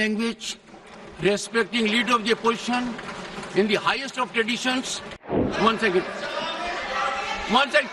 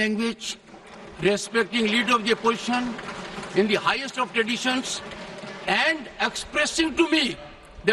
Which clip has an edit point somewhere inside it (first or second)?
first